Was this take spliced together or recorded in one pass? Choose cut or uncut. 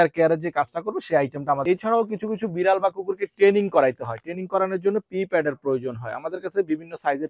cut